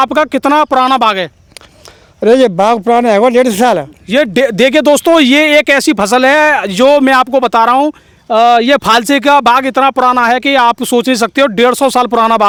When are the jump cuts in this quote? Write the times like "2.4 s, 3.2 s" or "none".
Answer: none